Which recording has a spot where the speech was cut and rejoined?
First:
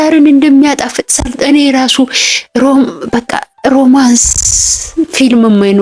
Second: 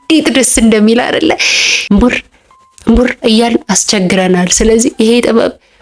second; 1 cut; at 1.8 s

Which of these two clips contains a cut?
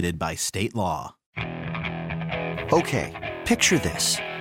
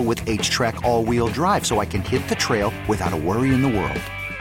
first; 1 cut; at 1.2 s

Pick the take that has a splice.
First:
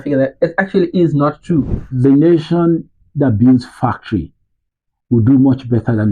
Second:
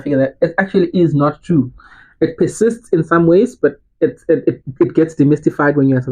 first; 1 cut; at 1.8 s

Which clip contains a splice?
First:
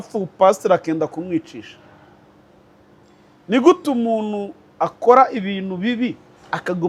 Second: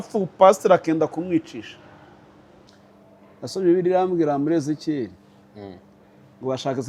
second; 1 cut; at 2.7 s

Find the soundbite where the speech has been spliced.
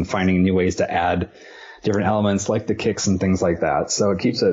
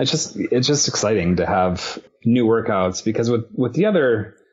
second; 1 cut; at 2.0 s

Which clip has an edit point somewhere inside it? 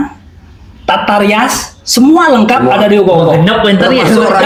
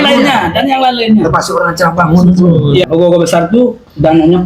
second; 1 cut; at 2.9 s

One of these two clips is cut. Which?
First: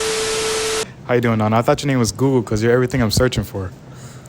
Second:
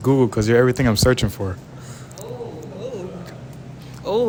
first; 1 cut; at 0.9 s

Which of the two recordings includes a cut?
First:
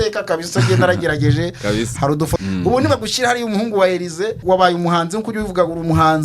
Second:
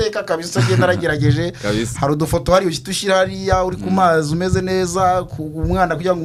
first; 2 cuts; at 2.4 s, 4.4 s

